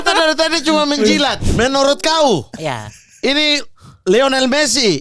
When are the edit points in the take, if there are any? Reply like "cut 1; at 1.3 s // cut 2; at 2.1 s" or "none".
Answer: cut 1; at 1.4 s